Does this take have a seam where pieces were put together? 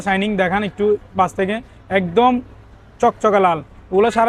no; 0 cuts

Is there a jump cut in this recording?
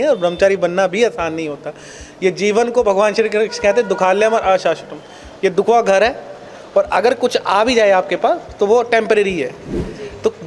no; 0 cuts

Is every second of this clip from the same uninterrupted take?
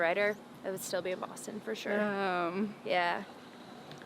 yes; 0 cuts

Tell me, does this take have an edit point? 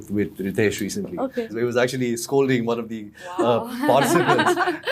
yes; 1 cut; at 1.5 s

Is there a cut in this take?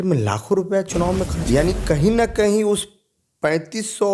yes; 1 cut; at 1.4 s

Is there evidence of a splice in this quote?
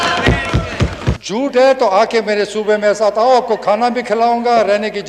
yes; 1 cut; at 1.2 s

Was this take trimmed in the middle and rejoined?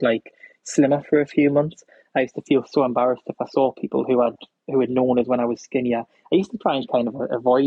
no; 0 cuts

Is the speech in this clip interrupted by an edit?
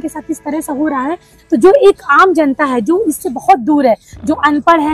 no; 0 cuts

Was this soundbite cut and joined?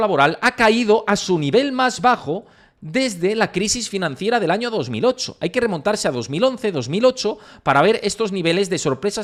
no; 0 cuts

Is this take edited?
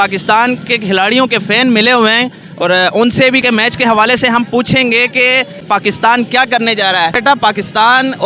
yes; 3 cuts; at 3.4 s, 5.6 s, 7.2 s

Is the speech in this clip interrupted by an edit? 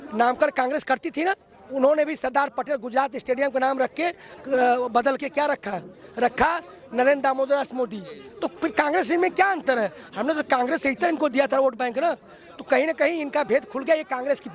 no; 0 cuts

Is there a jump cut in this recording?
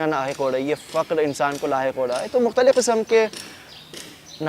no; 0 cuts

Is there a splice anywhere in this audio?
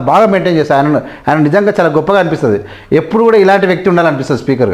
no; 0 cuts

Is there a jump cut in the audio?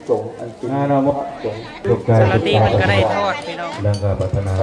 yes; 1 cut; at 1.8 s

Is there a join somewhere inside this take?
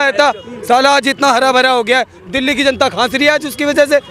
no; 0 cuts

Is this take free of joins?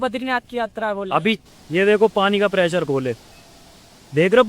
no; 1 cut; at 1.4 s

